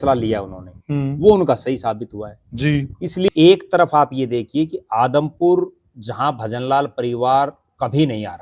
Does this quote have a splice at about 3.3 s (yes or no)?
yes